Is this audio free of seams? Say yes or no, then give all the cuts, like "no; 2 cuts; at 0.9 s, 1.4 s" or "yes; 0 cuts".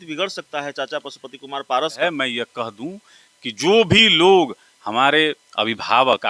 no; 1 cut; at 2.0 s